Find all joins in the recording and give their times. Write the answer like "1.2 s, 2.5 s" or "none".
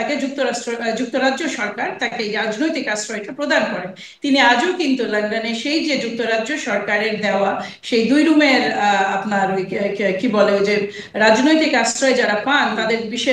none